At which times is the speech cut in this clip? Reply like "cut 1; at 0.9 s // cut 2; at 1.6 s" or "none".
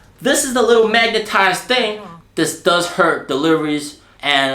cut 1; at 2.1 s